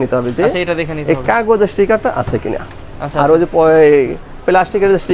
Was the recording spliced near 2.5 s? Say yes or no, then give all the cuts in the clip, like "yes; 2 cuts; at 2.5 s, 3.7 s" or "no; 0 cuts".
no; 0 cuts